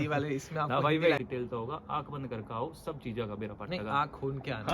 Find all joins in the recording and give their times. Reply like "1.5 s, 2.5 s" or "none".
1.2 s